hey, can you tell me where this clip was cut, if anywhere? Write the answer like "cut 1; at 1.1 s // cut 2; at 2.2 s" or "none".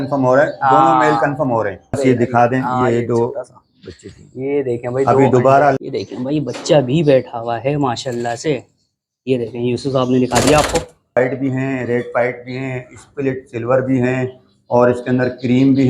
cut 1; at 2.0 s // cut 2; at 5.8 s // cut 3; at 11.2 s